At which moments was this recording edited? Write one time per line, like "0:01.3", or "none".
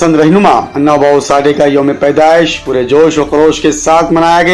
none